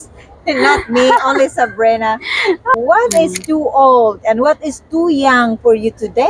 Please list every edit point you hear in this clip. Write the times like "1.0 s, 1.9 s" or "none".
2.7 s